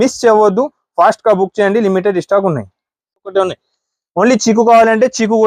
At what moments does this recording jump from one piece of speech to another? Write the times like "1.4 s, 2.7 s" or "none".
3.3 s